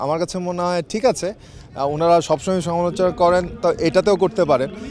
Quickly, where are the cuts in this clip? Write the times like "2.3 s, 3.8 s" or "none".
none